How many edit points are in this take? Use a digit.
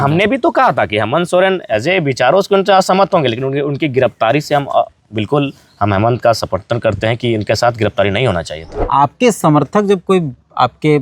1